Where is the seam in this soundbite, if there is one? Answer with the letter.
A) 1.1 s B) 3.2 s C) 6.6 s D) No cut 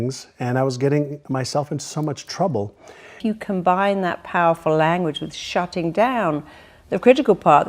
B